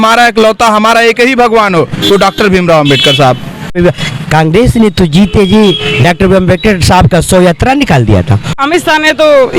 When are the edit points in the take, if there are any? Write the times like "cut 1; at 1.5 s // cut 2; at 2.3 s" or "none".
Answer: cut 1; at 3.8 s // cut 2; at 8.6 s